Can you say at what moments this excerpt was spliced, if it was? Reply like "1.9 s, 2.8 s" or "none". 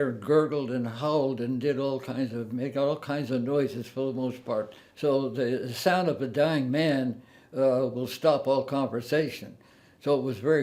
4.8 s